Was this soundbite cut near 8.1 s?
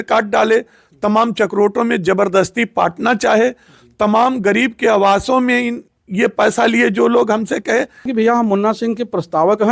yes; 1 cut; at 8.1 s

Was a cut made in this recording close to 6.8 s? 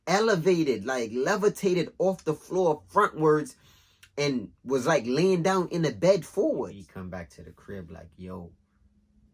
yes; 1 cut; at 6.8 s

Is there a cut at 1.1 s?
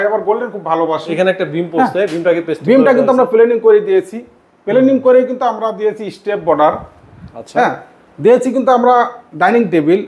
no; 0 cuts

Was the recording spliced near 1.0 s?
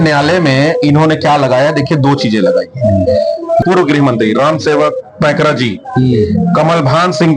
no; 1 cut; at 3.6 s

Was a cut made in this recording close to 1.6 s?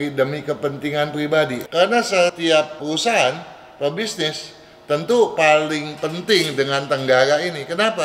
yes; 2 cuts; at 1.6 s, 2.6 s

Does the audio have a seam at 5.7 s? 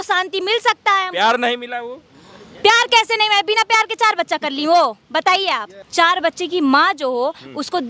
yes; 1 cut; at 5.7 s

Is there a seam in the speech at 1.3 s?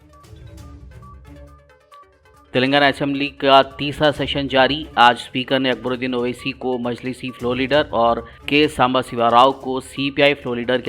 yes; 1 cut; at 1.3 s

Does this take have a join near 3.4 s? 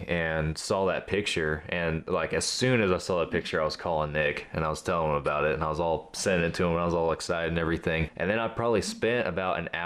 no; 1 cut; at 8.1 s

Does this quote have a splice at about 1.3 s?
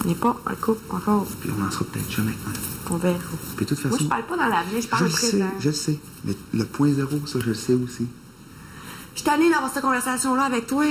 yes; 1 cut; at 1.3 s

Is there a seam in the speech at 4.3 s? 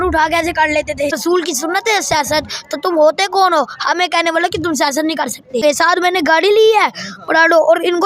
no; 2 cuts; at 1.1 s, 5.6 s

